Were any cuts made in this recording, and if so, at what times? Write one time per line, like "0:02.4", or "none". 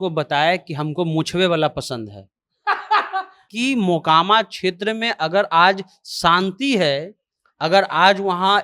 0:03.5